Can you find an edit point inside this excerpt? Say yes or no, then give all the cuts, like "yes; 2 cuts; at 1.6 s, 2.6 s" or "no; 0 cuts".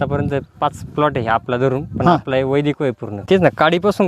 yes; 1 cut; at 3.1 s